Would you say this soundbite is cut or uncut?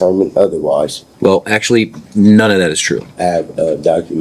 cut